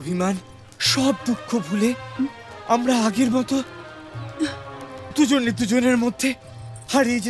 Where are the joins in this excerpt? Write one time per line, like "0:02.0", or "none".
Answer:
none